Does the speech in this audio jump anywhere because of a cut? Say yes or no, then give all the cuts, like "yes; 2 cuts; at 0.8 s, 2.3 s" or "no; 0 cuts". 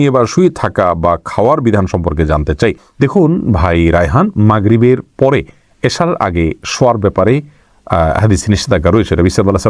no; 0 cuts